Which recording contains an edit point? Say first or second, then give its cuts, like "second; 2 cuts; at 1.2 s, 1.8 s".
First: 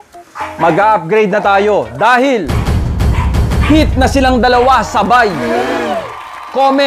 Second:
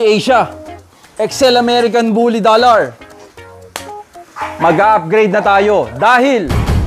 first; 1 cut; at 5.8 s